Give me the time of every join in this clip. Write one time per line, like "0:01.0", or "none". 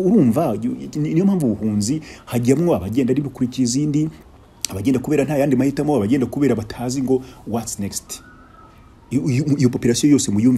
none